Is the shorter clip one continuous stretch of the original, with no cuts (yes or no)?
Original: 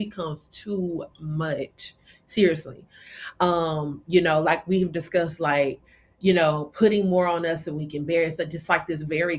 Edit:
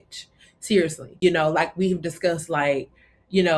no